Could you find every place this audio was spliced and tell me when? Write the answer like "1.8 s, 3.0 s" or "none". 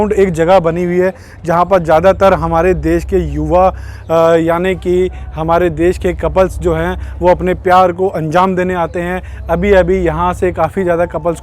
none